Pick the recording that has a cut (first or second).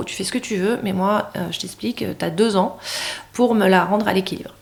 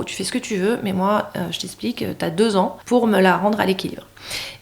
second